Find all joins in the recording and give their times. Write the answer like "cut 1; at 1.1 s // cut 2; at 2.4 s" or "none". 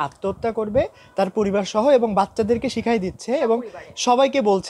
none